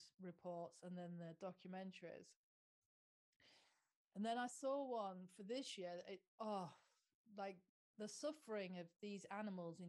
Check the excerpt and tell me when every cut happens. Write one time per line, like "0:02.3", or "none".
0:06.2